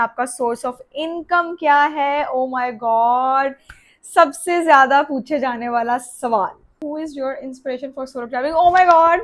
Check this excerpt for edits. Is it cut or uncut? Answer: cut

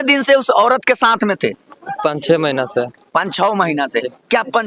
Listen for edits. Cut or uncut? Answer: uncut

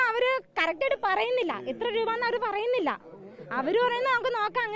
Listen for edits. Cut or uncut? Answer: uncut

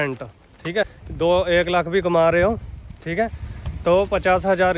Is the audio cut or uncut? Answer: cut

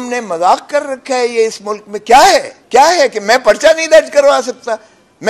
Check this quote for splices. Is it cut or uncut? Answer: cut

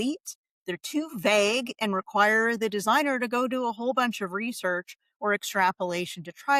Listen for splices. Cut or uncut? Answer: uncut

